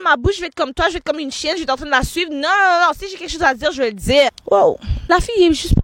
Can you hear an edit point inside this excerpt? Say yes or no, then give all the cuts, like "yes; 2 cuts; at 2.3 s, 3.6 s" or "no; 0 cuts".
yes; 1 cut; at 4.9 s